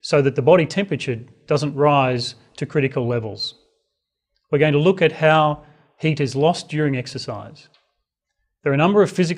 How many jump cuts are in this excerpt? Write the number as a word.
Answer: one